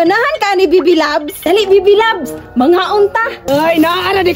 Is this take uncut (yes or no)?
no